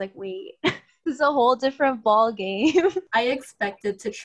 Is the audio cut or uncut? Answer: cut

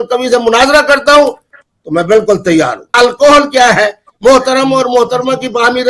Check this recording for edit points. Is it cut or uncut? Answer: cut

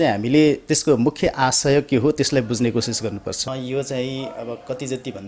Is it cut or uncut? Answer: cut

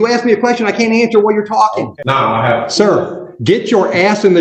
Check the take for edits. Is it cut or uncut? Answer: cut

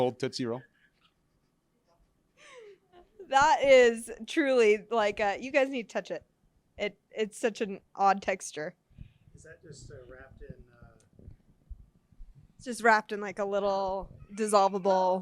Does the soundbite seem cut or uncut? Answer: cut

